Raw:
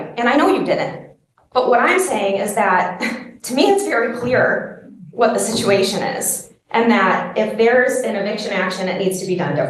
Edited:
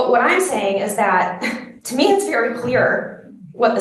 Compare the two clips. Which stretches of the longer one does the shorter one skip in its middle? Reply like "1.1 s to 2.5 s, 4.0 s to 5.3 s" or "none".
none